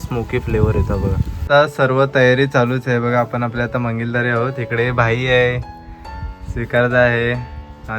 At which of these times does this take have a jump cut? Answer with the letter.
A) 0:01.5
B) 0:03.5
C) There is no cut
A